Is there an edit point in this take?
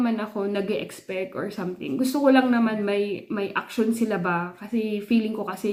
no; 0 cuts

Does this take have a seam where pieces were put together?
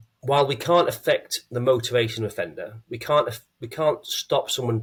no; 0 cuts

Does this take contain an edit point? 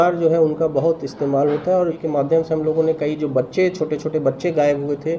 yes; 1 cut; at 2.0 s

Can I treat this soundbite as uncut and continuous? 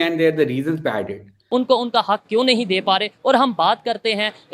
no; 1 cut; at 1.4 s

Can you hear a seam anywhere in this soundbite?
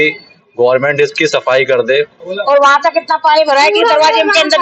yes; 1 cut; at 2.3 s

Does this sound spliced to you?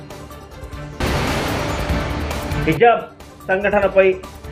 no; 0 cuts

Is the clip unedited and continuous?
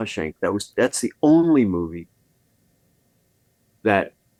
yes; 0 cuts

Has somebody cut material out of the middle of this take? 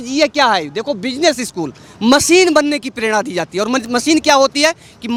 no; 0 cuts

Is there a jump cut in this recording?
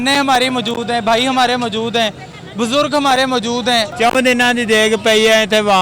yes; 1 cut; at 3.9 s

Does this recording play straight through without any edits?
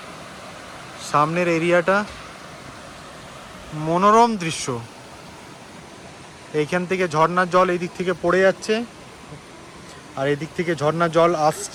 yes; 0 cuts

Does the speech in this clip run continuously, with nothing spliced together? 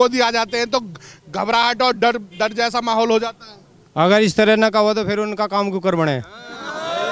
yes; 0 cuts

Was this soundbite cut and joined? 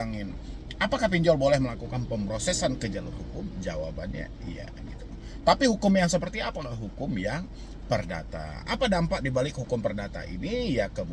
no; 0 cuts

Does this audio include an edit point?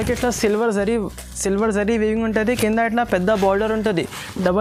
no; 0 cuts

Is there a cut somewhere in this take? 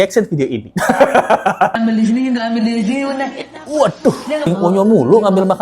yes; 2 cuts; at 1.7 s, 4.5 s

